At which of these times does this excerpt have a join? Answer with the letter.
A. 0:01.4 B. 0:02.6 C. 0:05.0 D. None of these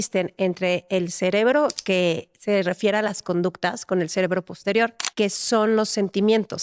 C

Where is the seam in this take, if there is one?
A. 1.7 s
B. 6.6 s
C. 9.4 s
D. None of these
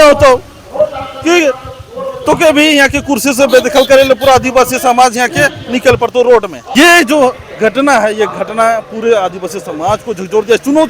B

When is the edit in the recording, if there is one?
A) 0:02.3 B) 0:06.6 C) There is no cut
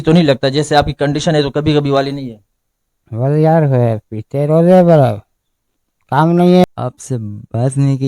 B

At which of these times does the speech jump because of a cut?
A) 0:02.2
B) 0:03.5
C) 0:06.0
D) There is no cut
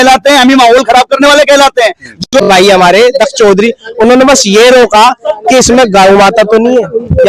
A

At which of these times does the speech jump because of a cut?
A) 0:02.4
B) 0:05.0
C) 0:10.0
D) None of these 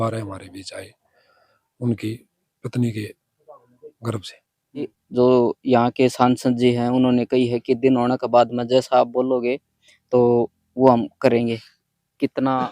B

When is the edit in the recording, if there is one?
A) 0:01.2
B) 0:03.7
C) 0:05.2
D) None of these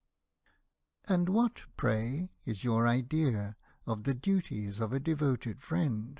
C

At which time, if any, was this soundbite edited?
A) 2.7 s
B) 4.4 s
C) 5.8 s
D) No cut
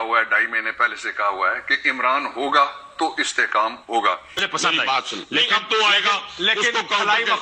B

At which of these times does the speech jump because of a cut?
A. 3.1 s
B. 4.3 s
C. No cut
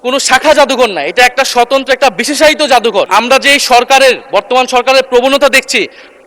A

